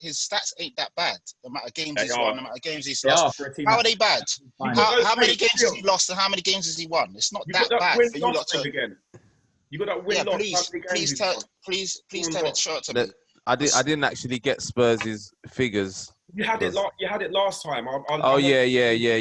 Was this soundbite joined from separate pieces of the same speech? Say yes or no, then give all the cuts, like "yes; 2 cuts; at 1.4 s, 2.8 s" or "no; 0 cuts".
no; 0 cuts